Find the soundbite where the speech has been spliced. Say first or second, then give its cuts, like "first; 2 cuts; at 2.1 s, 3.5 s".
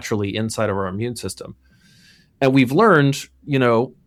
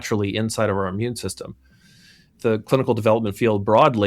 second; 1 cut; at 2.3 s